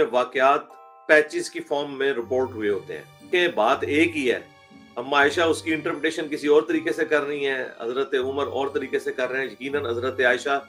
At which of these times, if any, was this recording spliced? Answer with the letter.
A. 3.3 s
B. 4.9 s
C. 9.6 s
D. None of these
A